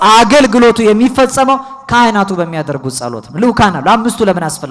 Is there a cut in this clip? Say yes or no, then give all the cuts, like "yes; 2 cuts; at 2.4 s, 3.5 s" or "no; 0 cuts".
no; 0 cuts